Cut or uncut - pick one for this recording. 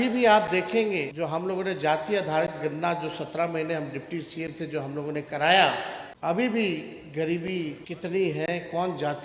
cut